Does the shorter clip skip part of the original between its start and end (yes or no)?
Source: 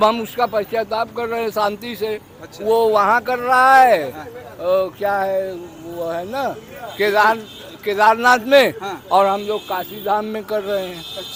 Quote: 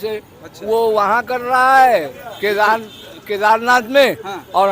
yes